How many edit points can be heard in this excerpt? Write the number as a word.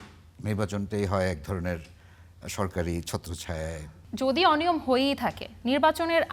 one